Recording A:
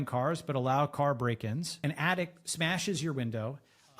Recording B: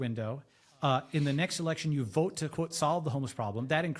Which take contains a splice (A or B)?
A